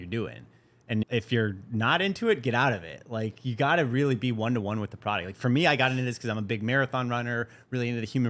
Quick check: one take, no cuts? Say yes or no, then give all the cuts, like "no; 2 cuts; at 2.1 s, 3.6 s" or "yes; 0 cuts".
no; 1 cut; at 1.0 s